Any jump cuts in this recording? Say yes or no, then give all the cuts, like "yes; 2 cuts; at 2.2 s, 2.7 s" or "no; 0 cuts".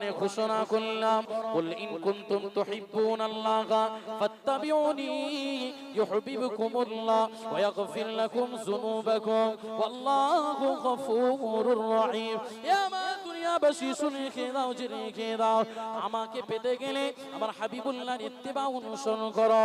yes; 1 cut; at 1.3 s